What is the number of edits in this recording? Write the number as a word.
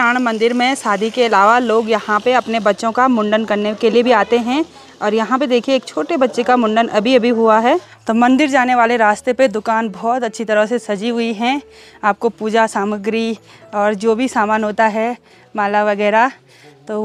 zero